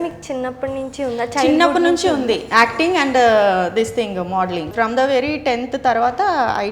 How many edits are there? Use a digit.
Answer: 1